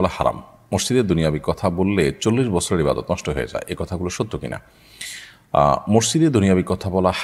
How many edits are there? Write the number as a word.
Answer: zero